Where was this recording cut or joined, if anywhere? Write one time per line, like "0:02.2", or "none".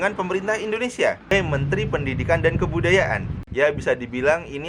0:01.3
0:03.4

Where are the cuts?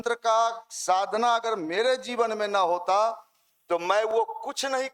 none

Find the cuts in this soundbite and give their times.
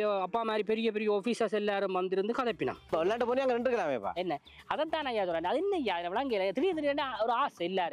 0:02.9

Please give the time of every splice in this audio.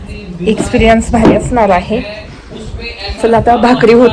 none

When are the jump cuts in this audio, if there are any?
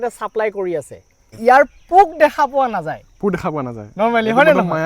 0:01.4

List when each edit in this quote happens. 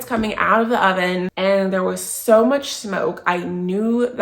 0:01.3

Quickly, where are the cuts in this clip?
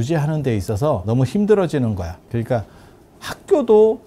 0:01.0
0:02.2

